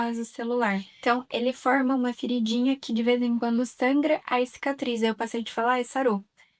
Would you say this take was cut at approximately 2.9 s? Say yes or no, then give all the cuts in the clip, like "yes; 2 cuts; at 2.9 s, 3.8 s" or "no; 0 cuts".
no; 1 cut; at 0.9 s